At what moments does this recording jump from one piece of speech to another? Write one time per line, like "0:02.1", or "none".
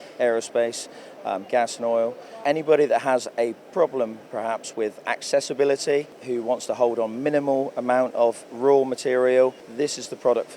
0:02.4
0:06.2
0:09.6

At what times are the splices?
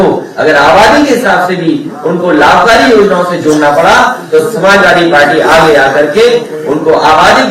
none

